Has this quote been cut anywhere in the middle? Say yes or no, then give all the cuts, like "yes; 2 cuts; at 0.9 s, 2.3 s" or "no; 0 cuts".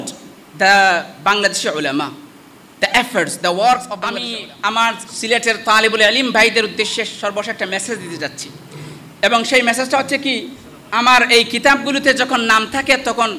yes; 1 cut; at 4.2 s